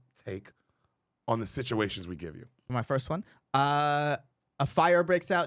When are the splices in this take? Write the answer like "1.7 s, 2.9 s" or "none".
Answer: 2.7 s